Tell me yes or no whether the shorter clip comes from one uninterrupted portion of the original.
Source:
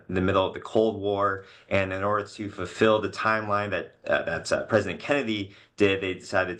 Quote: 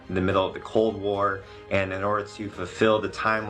yes